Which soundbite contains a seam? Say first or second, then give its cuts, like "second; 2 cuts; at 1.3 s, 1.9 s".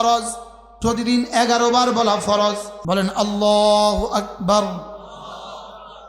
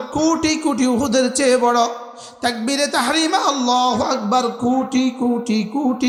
first; 1 cut; at 2.7 s